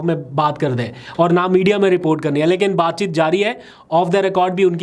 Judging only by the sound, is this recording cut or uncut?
uncut